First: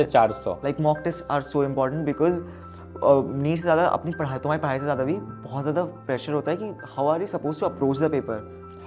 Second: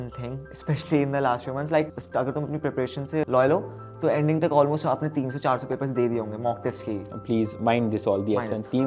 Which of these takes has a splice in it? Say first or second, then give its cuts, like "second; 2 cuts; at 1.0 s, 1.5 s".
second; 2 cuts; at 2.0 s, 3.3 s